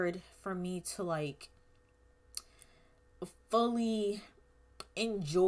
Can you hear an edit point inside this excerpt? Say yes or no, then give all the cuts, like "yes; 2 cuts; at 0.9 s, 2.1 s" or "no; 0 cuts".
no; 0 cuts